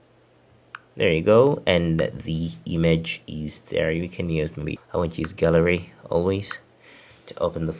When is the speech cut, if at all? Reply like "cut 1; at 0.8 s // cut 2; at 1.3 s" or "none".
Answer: cut 1; at 4.8 s